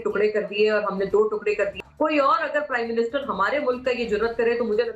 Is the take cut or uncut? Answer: cut